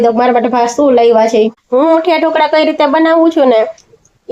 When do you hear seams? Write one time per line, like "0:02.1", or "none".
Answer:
0:01.6